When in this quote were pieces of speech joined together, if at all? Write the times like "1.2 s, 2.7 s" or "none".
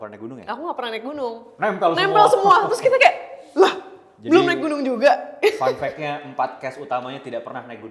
none